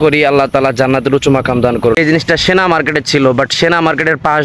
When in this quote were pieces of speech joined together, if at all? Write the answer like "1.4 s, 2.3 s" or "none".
2.0 s